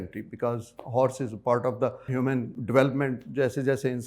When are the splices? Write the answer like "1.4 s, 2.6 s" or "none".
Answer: 2.4 s